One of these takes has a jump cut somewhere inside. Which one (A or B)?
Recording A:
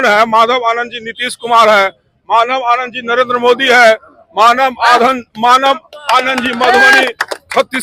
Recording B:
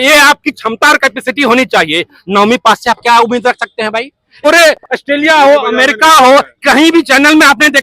B